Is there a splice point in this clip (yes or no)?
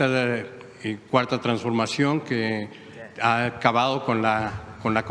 no